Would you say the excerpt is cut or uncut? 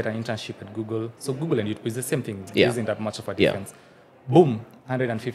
uncut